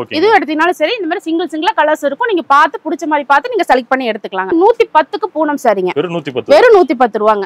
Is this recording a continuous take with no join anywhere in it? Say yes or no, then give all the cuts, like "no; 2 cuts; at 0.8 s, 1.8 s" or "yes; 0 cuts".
no; 2 cuts; at 4.5 s, 5.9 s